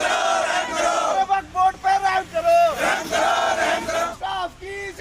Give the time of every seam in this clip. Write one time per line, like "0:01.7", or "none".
0:04.1